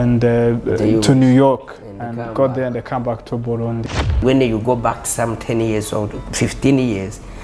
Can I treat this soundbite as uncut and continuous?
no; 1 cut; at 4.2 s

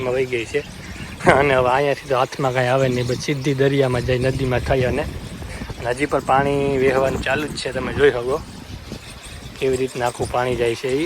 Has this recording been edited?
no; 0 cuts

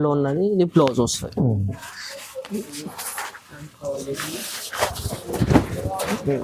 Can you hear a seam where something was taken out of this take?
no; 0 cuts

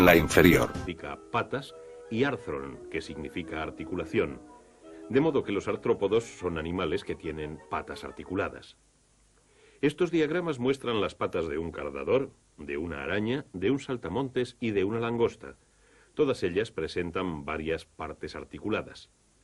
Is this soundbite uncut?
yes; 0 cuts

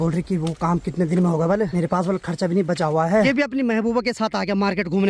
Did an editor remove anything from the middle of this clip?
yes; 2 cuts; at 1.7 s, 3.3 s

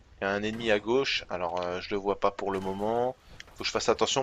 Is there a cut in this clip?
yes; 1 cut; at 1.2 s

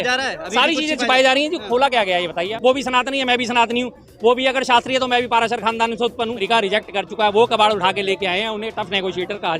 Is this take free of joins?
no; 2 cuts; at 2.5 s, 6.4 s

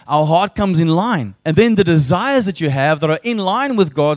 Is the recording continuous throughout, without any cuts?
no; 1 cut; at 1.3 s

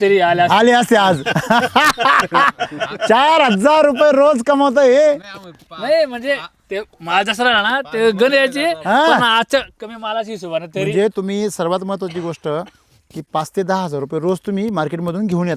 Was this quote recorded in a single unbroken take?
yes; 0 cuts

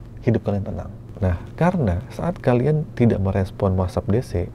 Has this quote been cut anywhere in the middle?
yes; 1 cut; at 1.0 s

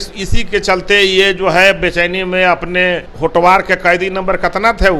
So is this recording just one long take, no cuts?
no; 1 cut; at 3.1 s

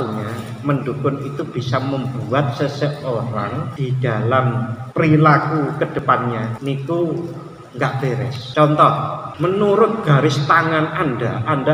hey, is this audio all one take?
no; 5 cuts; at 3.7 s, 4.8 s, 6.0 s, 8.4 s, 9.2 s

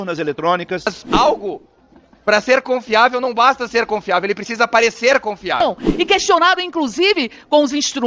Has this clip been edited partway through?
yes; 2 cuts; at 1.0 s, 5.6 s

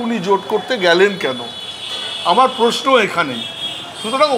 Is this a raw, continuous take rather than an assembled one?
yes; 0 cuts

